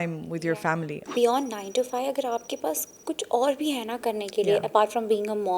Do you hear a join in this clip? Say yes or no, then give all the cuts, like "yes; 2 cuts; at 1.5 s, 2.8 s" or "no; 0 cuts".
yes; 1 cut; at 0.9 s